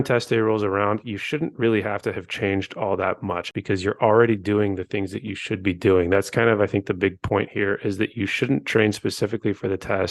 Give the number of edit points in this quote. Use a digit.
1